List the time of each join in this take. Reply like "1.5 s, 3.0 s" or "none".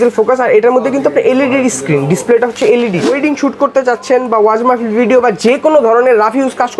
3.1 s